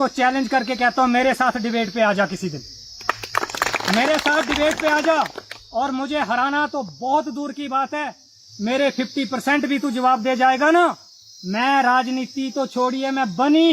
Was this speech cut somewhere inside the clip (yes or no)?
no